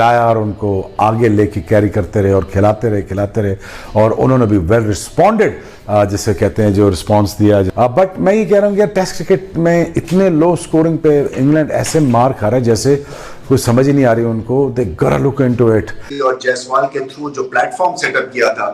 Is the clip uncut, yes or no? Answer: no